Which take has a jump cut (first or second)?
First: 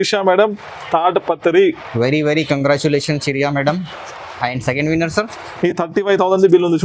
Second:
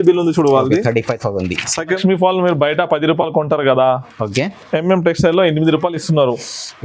second